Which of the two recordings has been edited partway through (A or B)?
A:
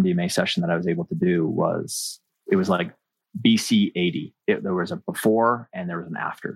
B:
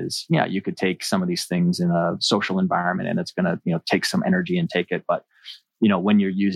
A